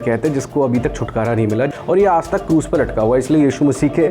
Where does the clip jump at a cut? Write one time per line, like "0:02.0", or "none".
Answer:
0:01.7